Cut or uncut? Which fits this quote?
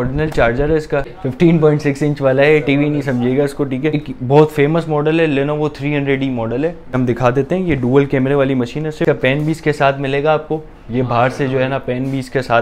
cut